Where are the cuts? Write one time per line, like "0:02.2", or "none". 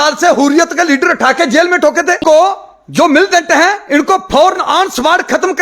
0:02.2